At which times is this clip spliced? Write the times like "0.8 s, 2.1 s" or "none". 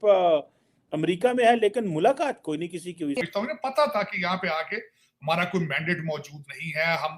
3.2 s